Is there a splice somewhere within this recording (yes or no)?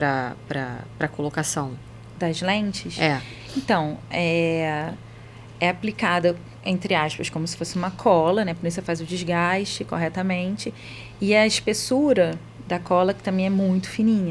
no